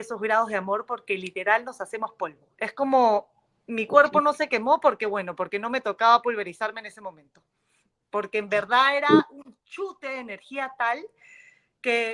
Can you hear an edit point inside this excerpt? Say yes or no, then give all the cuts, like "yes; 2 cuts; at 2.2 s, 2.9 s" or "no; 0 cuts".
no; 0 cuts